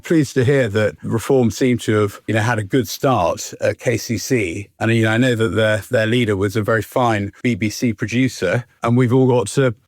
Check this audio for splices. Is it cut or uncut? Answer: cut